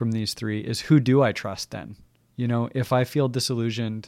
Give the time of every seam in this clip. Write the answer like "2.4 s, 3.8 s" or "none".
2.4 s